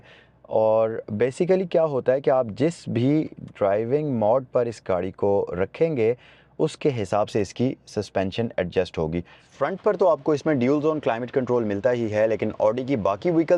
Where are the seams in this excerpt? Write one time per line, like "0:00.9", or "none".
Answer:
0:09.4